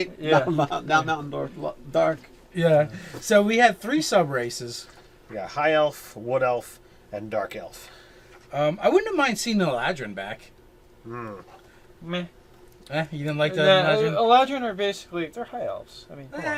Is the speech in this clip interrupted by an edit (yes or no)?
no